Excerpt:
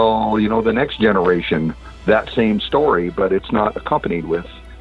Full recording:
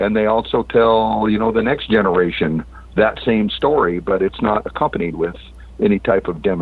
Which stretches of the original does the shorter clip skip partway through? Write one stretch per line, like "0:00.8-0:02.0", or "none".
none

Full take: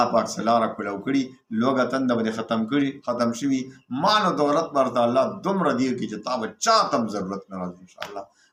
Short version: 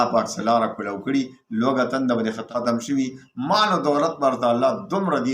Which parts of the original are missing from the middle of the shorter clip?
0:02.4-0:03.0

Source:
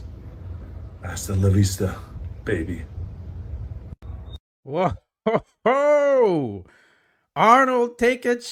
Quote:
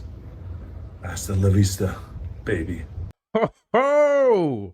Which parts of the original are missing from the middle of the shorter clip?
0:03.2-0:05.1

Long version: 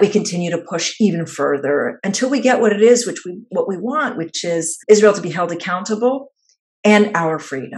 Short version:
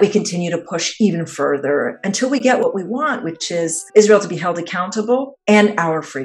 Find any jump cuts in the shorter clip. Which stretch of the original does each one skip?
0:02.6-0:03.6
0:06.3-0:06.7

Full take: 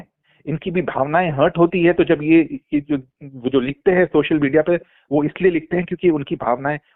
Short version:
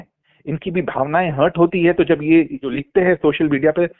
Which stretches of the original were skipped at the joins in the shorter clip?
0:02.7-0:03.6

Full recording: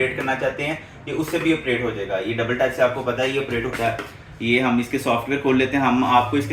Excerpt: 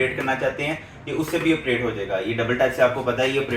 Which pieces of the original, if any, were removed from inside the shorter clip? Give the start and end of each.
none

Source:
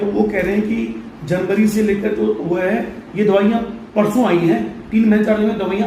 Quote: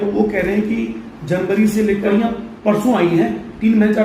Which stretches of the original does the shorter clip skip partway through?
0:02.1-0:03.4

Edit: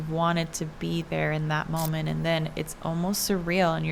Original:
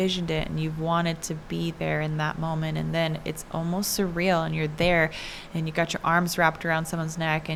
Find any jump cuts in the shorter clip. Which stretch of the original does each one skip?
none

